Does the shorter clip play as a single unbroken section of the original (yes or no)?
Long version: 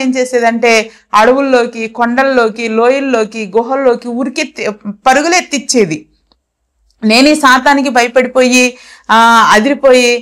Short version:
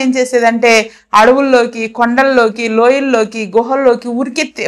yes